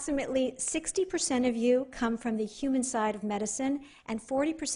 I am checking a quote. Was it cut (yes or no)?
no